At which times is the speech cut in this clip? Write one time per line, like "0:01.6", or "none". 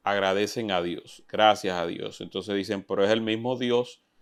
none